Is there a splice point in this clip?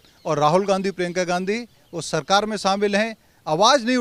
no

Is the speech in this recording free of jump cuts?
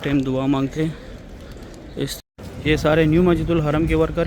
no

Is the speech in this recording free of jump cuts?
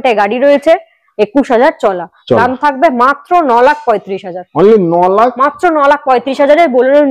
yes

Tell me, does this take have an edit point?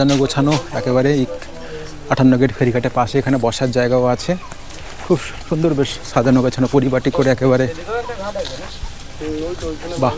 no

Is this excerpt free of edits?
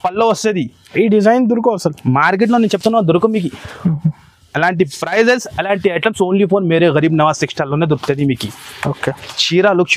yes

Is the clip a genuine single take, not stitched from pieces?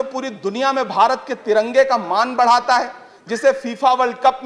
yes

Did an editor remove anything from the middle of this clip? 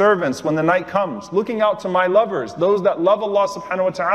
no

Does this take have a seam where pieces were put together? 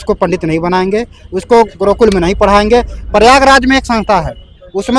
no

